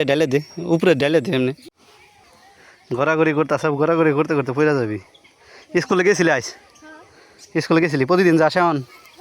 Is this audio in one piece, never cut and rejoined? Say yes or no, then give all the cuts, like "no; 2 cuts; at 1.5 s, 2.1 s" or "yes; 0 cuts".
no; 1 cut; at 2.1 s